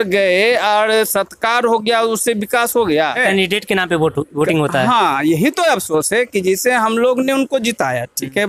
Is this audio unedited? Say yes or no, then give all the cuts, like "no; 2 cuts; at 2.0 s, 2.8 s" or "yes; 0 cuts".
no; 1 cut; at 3.2 s